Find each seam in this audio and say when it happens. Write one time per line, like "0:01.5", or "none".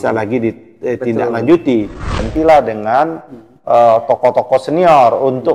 0:02.3